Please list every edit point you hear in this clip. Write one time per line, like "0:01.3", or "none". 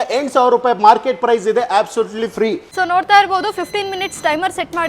0:02.7